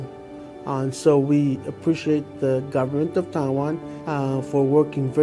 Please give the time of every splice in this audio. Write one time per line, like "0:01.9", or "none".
0:03.9